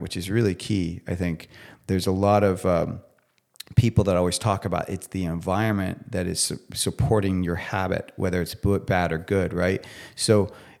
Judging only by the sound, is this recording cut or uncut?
uncut